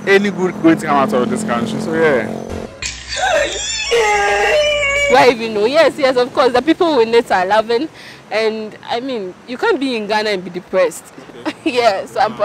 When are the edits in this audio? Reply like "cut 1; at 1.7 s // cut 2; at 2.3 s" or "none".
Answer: cut 1; at 5.1 s